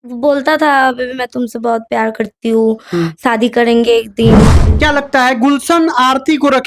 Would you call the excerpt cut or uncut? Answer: cut